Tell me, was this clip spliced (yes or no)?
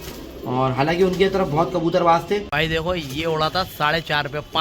yes